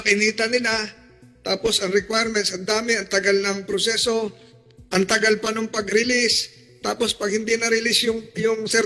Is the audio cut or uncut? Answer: uncut